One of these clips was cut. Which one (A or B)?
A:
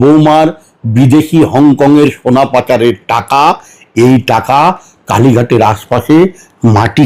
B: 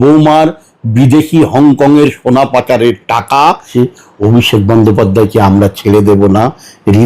B